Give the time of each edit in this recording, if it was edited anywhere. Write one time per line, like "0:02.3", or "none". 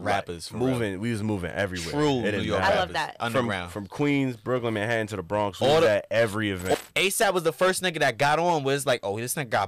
0:06.7